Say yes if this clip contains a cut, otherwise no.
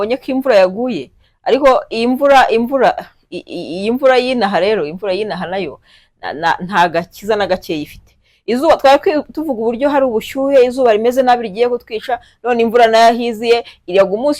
no